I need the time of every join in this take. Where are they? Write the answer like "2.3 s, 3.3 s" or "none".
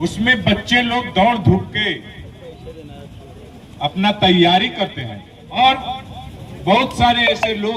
5.6 s